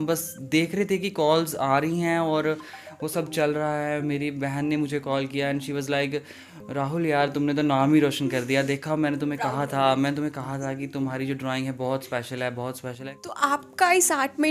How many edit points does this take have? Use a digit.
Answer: 1